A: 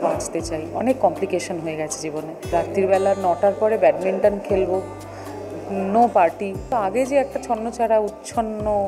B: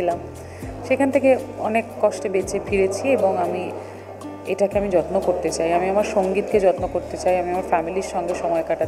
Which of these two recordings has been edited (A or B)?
A